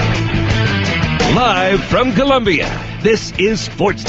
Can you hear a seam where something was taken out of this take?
no; 0 cuts

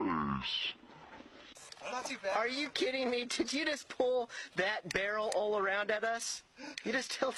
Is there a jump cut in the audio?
no; 0 cuts

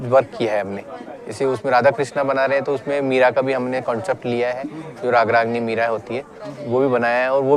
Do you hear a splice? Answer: no; 0 cuts

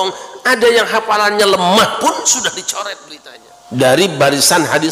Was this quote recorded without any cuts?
no; 1 cut; at 3.1 s

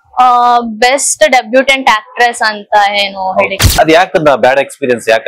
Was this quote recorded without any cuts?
no; 1 cut; at 3.5 s

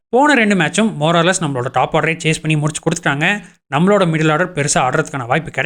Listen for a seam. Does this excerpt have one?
no; 0 cuts

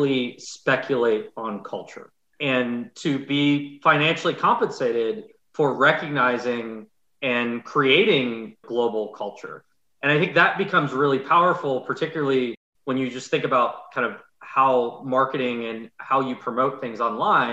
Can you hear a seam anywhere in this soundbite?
yes; 1 cut; at 8.6 s

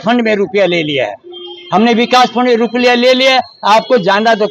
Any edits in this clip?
no; 0 cuts

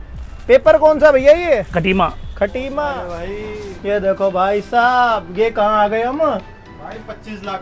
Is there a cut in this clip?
yes; 1 cut; at 2.9 s

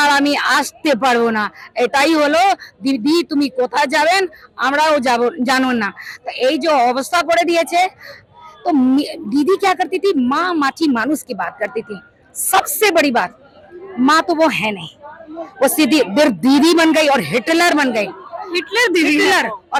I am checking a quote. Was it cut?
no; 0 cuts

